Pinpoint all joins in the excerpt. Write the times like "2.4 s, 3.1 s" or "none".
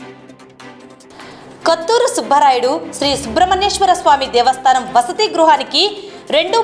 none